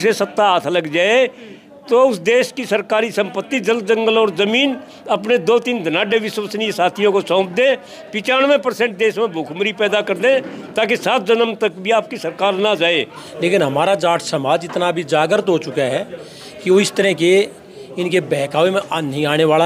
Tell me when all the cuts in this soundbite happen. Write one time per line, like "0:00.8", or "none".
0:13.2